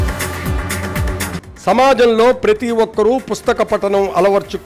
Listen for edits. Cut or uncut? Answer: cut